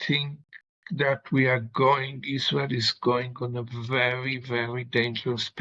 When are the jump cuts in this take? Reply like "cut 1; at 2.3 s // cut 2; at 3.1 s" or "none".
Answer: none